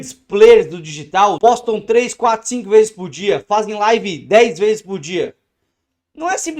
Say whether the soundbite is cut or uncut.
cut